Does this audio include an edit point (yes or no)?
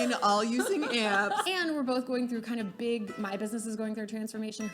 yes